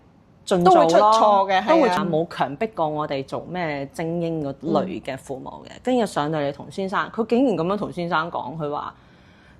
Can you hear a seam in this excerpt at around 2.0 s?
yes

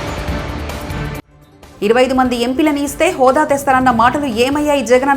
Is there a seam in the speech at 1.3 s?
yes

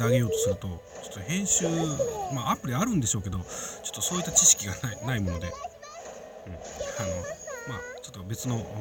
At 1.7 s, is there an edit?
no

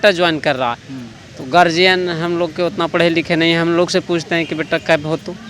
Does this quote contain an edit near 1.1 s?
no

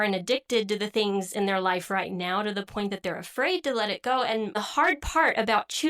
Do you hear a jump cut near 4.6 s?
yes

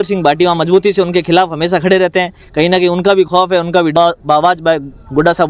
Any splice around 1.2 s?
no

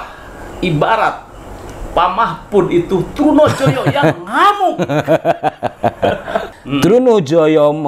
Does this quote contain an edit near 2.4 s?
no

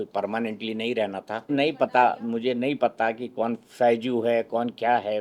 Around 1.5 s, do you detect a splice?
yes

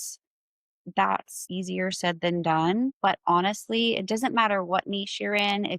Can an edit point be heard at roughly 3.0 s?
yes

